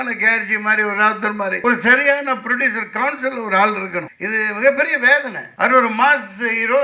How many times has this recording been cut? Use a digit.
3